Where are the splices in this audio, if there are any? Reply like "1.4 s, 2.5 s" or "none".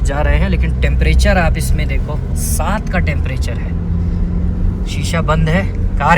none